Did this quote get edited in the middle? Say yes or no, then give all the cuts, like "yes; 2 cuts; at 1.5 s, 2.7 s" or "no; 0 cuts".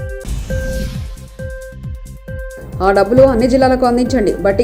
no; 0 cuts